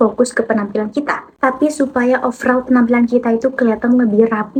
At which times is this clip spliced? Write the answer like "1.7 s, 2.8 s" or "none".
none

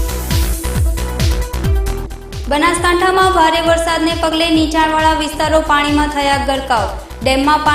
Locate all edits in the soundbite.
2.0 s

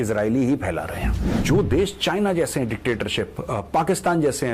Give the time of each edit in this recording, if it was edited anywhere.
1.4 s

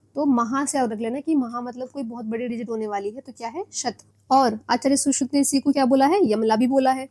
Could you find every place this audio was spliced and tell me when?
4.1 s

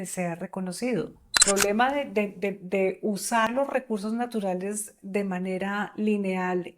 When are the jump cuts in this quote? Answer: 1.4 s, 3.5 s

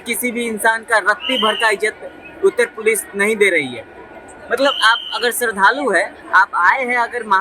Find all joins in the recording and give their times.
none

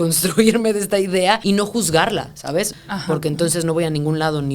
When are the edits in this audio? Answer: 1.4 s, 2.7 s

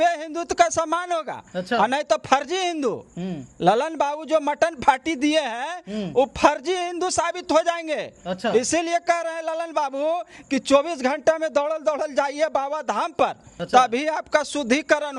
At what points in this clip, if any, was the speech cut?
13.5 s

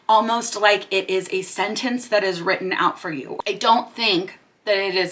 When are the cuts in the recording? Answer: 3.3 s

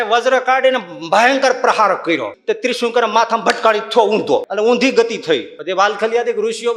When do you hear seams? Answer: 2.3 s, 4.5 s, 5.5 s

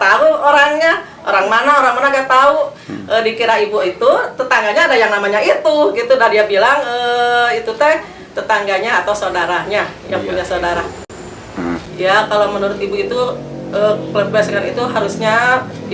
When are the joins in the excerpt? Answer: none

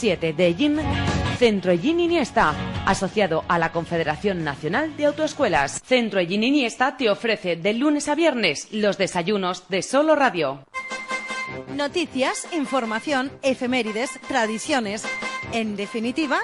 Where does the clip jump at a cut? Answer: 10.7 s

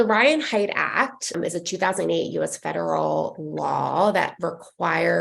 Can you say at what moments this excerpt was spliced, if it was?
1.3 s

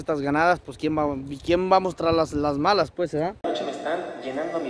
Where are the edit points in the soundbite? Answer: 3.4 s

